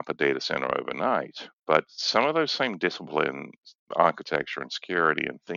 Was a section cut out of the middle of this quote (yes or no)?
no